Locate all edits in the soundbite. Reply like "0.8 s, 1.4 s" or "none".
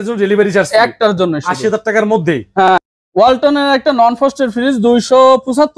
2.7 s